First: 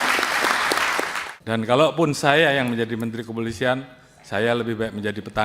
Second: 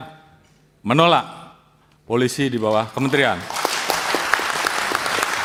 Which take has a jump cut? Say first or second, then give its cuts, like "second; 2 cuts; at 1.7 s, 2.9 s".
first; 1 cut; at 1.2 s